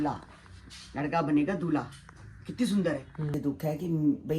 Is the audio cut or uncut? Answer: cut